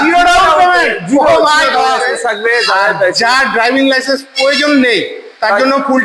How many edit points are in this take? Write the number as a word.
one